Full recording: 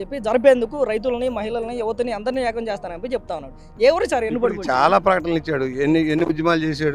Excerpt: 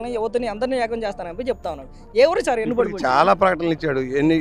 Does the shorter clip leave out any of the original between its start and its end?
no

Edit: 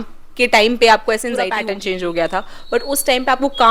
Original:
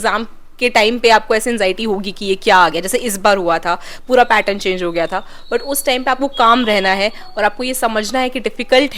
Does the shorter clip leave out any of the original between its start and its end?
yes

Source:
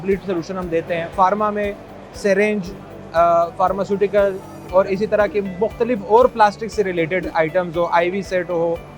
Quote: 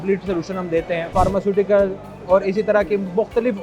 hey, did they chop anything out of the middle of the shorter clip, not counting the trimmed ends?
yes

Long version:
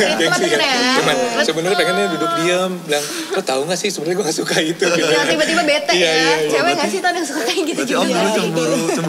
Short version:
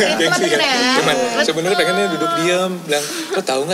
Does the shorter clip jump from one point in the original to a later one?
no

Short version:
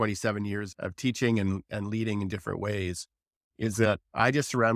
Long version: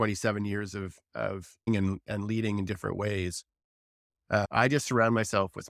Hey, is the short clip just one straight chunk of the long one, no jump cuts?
no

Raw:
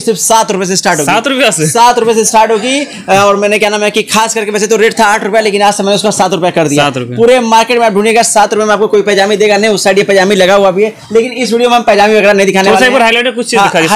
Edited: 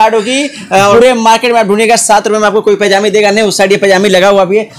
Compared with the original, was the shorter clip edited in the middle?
yes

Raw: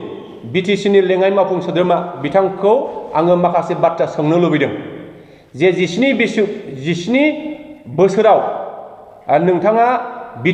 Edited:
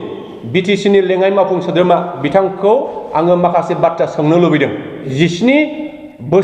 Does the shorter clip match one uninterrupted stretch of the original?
no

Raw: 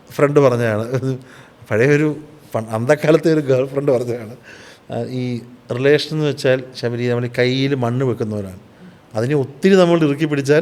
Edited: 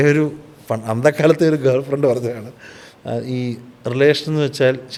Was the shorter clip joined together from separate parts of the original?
no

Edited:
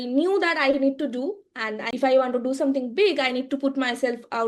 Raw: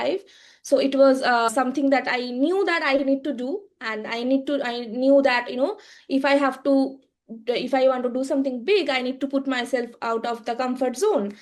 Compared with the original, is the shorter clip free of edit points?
no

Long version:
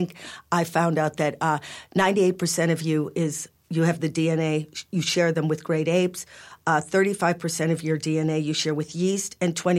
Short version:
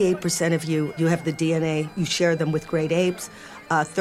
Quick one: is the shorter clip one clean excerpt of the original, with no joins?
no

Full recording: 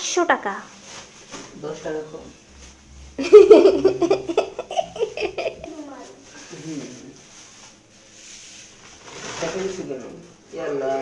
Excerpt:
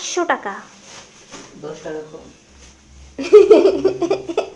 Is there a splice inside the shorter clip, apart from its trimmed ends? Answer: no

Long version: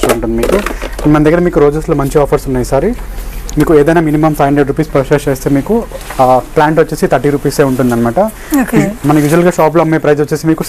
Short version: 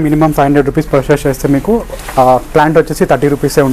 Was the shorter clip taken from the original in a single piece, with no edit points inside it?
yes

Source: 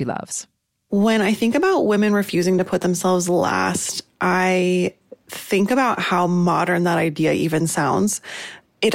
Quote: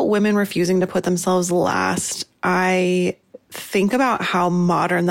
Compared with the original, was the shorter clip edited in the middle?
no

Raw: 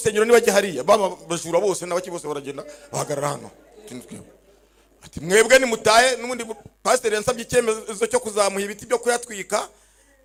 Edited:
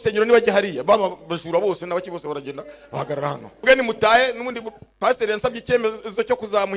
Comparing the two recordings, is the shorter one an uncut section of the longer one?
no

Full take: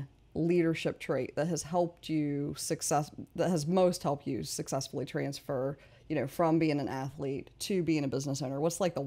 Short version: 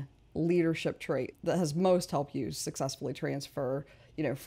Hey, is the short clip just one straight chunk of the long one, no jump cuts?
no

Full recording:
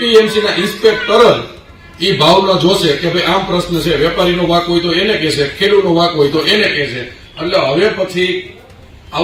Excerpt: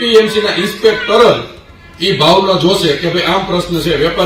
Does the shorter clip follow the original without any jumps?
yes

